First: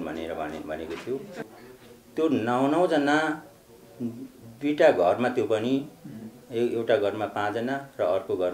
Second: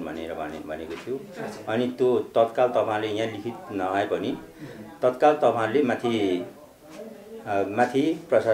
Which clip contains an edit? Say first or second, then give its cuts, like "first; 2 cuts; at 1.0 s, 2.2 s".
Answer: first; 1 cut; at 1.4 s